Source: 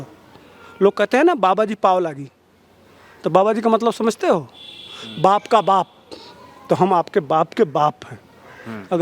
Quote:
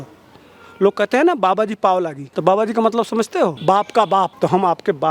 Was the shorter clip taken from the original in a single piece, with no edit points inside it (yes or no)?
no